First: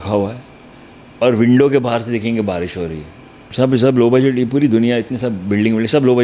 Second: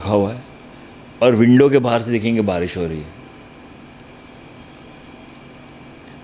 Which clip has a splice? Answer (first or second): first